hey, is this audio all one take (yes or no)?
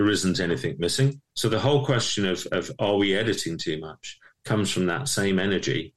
no